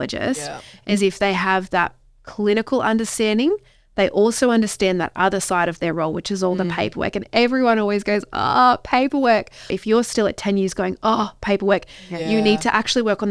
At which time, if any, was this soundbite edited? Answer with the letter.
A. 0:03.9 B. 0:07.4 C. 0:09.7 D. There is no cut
C